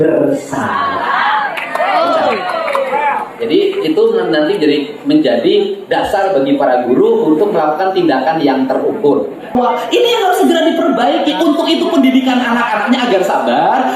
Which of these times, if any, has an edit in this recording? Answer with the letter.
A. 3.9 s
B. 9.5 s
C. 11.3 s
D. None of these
B